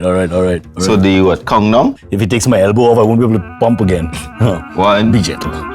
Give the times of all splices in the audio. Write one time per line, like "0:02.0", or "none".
0:02.1